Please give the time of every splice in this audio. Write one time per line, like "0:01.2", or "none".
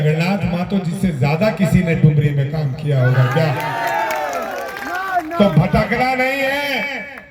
none